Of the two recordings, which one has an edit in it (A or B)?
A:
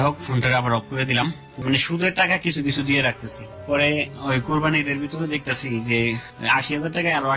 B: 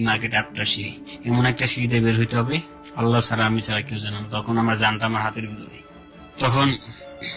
A